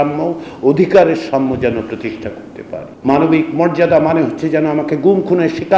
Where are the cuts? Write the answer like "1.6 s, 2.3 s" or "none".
2.9 s